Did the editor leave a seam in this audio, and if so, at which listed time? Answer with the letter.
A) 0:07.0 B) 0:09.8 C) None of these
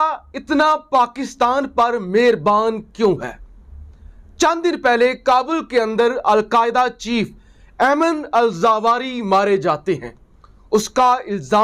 C